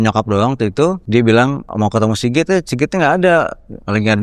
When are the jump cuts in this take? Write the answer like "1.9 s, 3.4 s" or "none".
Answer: 1.0 s, 1.6 s

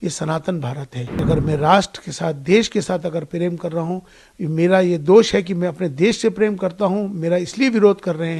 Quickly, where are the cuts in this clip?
1.2 s

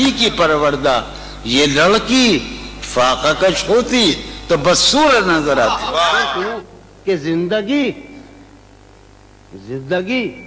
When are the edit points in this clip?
none

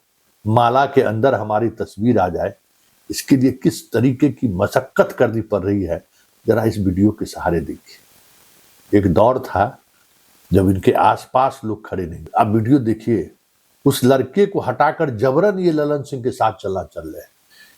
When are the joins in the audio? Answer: 12.2 s

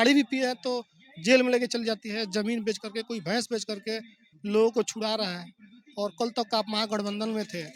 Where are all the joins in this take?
none

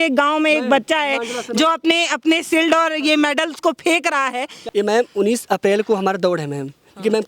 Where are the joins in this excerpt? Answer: 4.6 s

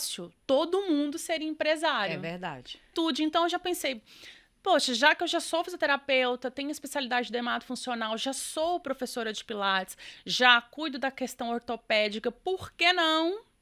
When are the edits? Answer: 2.9 s

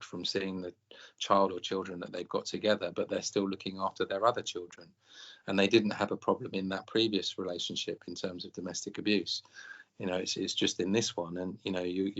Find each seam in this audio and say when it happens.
none

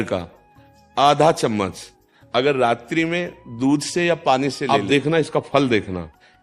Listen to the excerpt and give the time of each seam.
4.6 s

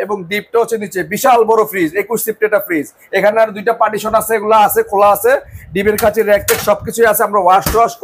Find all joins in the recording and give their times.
none

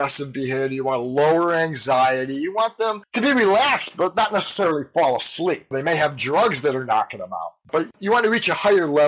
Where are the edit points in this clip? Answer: 8.0 s

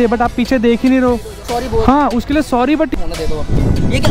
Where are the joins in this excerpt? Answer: 1.4 s, 2.9 s

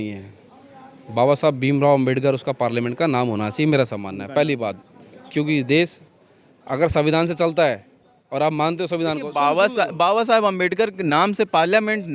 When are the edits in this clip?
none

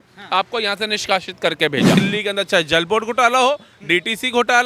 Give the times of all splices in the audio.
2.0 s

